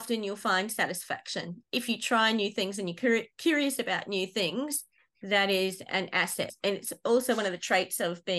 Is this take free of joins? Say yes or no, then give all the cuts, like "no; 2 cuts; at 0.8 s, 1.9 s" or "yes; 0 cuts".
no; 2 cuts; at 1.6 s, 6.5 s